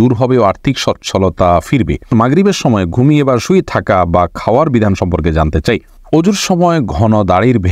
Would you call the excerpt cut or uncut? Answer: cut